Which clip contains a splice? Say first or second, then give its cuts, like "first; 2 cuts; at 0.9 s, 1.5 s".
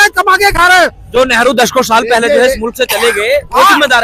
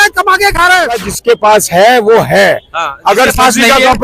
second; 1 cut; at 1.0 s